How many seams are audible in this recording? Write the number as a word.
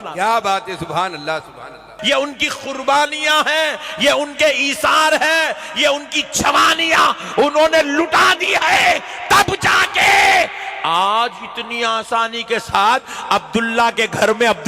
one